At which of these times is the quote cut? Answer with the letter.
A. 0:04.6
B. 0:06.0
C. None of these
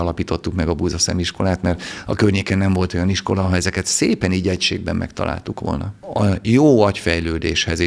B